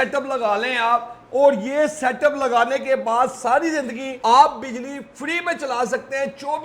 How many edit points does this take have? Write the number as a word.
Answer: one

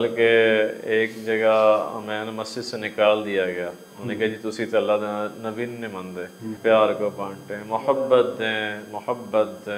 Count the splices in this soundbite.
one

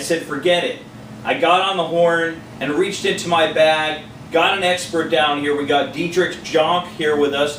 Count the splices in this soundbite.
one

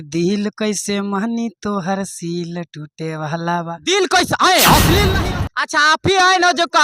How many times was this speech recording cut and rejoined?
one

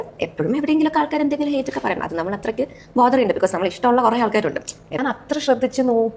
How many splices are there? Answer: one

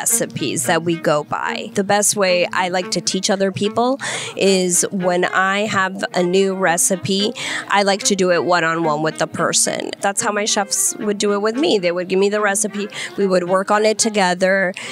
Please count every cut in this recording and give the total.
two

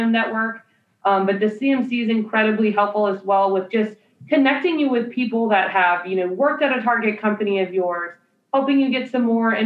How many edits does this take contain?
zero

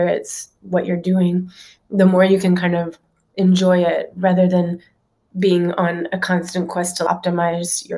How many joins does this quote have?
one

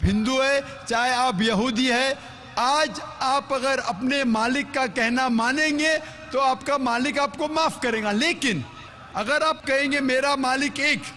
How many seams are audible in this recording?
one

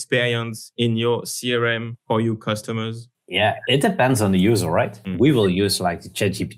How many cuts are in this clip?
zero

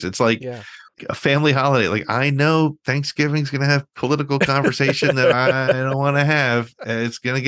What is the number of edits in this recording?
one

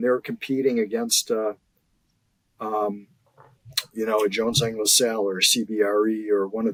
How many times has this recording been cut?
zero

